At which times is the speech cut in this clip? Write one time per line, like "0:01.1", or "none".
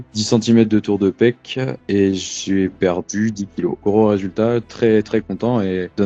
0:01.8
0:03.8